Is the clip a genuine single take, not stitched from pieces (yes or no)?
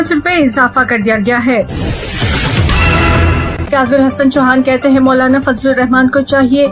no